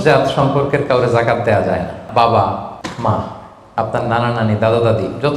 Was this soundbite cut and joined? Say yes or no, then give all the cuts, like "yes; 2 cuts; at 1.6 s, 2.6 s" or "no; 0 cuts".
yes; 2 cuts; at 2.1 s, 2.8 s